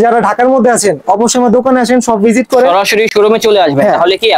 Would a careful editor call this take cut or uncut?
uncut